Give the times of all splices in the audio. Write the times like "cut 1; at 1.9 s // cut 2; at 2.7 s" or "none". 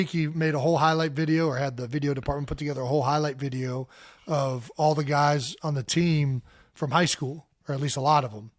none